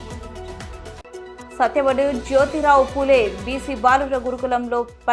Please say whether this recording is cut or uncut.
cut